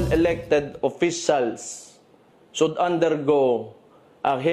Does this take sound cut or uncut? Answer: uncut